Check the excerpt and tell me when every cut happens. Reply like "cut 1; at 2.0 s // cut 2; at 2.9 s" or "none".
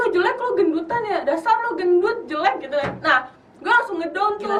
none